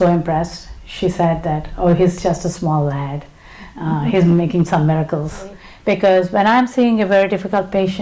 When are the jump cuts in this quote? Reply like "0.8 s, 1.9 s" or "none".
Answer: 5.7 s